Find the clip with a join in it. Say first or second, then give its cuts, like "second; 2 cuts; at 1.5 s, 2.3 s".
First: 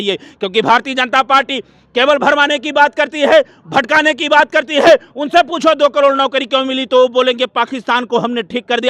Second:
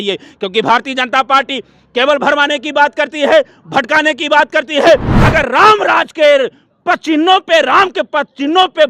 second; 1 cut; at 5.1 s